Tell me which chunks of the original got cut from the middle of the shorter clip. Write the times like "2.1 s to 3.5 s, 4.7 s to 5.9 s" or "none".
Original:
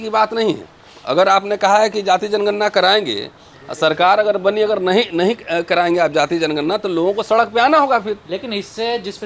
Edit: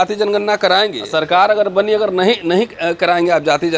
3.1 s to 3.7 s